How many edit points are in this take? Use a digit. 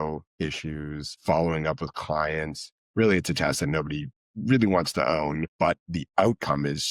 2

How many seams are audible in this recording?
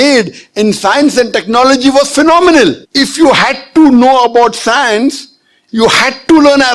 2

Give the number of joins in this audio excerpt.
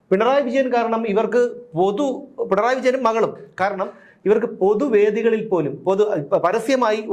0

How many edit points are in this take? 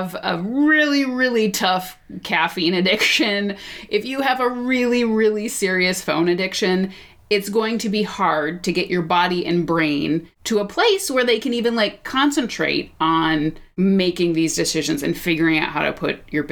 2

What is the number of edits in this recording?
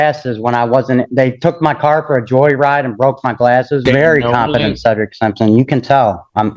1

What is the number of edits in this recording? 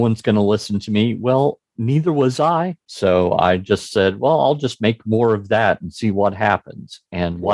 1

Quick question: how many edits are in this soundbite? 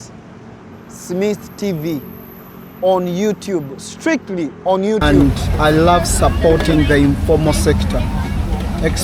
1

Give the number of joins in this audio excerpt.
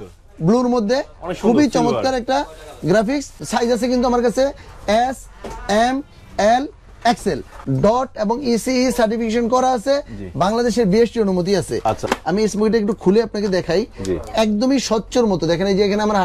3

